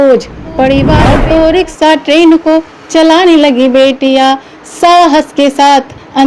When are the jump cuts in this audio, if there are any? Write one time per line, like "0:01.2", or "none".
0:00.9